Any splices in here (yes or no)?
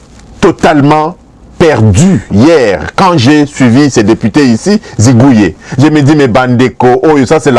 no